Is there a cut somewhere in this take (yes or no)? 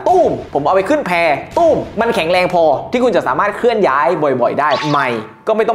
yes